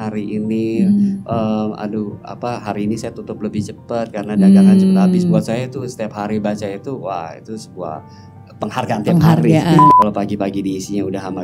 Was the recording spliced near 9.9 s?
yes; 1 cut; at 9.9 s

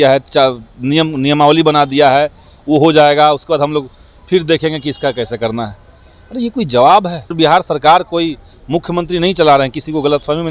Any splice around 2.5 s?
no; 1 cut; at 7.3 s

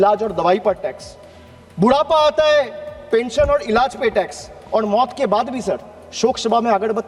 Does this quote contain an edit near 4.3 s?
no; 0 cuts

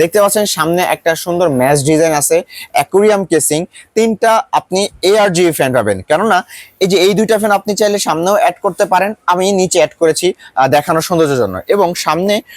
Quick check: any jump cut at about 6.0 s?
no; 0 cuts

